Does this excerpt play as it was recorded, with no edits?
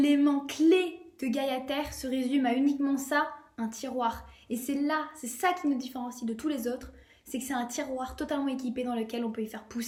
yes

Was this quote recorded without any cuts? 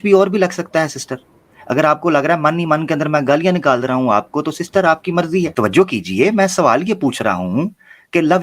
no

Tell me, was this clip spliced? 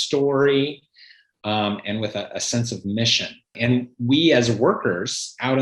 yes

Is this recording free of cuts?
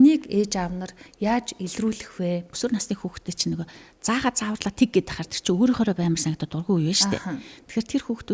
no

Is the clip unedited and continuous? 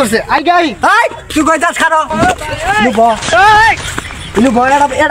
yes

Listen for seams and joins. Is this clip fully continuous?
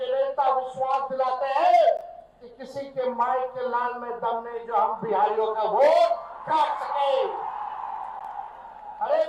yes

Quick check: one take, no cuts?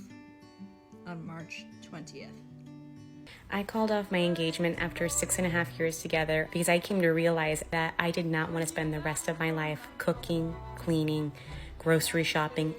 no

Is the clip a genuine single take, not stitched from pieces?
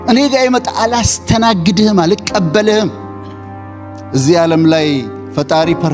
no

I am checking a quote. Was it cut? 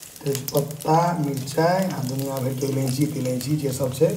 no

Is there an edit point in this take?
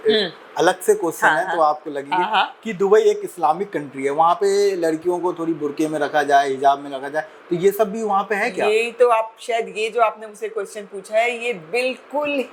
no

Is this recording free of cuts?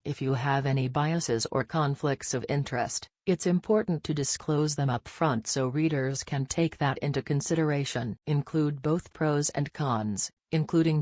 yes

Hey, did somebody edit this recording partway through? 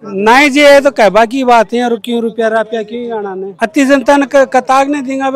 yes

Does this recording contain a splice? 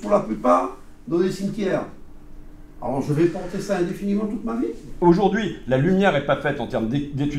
no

